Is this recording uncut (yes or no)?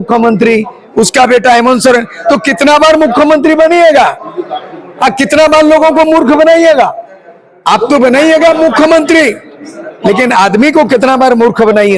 yes